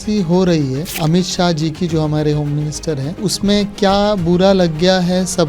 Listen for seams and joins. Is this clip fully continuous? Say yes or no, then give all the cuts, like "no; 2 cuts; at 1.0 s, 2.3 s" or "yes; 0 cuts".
no; 2 cuts; at 0.9 s, 3.3 s